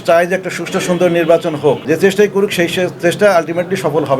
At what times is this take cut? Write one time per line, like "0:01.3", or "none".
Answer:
0:01.8